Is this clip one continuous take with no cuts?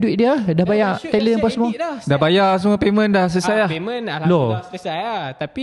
yes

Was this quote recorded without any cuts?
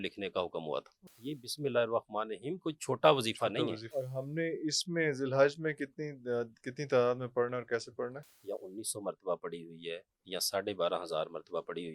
no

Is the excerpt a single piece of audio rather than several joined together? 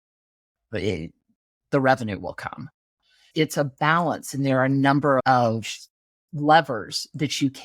yes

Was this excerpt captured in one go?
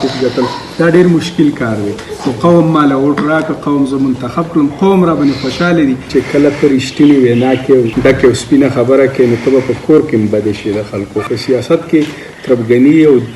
no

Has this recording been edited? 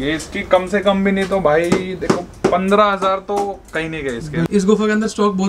yes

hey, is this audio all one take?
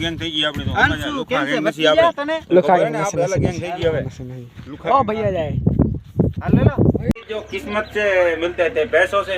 no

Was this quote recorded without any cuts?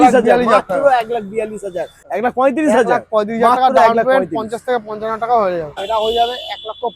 no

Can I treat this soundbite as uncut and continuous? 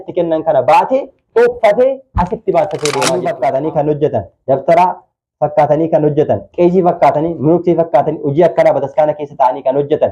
no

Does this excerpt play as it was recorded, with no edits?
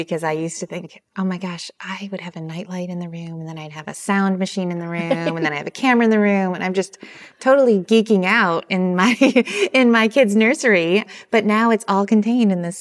yes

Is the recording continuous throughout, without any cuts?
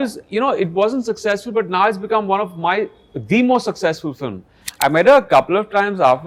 no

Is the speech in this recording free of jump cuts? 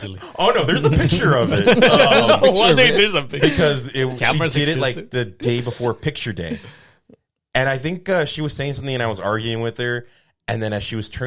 yes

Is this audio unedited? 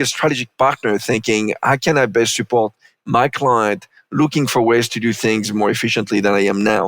yes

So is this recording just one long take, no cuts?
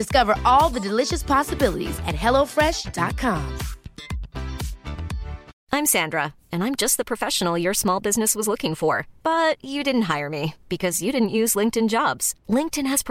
no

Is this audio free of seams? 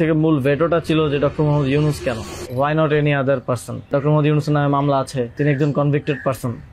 no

